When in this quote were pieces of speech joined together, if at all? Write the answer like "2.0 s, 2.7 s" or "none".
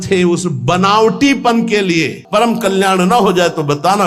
2.2 s